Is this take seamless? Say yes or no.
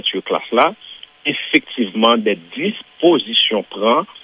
yes